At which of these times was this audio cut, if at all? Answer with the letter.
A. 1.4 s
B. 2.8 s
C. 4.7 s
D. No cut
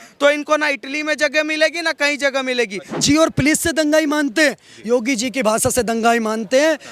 B